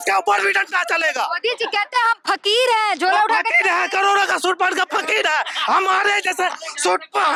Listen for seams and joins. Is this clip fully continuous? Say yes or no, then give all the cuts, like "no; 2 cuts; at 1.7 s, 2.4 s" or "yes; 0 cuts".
yes; 0 cuts